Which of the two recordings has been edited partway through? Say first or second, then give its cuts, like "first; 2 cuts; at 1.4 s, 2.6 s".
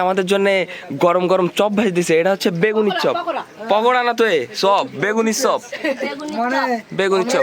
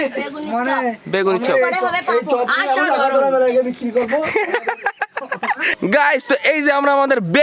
second; 1 cut; at 5.7 s